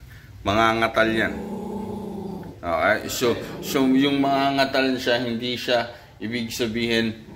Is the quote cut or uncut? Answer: uncut